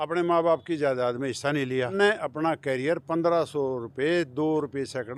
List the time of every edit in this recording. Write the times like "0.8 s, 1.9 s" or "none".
1.9 s